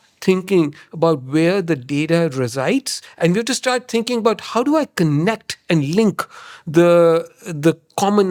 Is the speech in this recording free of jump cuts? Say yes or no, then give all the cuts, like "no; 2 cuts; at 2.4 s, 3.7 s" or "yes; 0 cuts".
yes; 0 cuts